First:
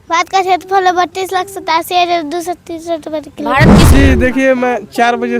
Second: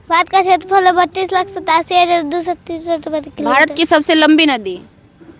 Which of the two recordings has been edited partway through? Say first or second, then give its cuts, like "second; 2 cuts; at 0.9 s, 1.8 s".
first; 1 cut; at 3.9 s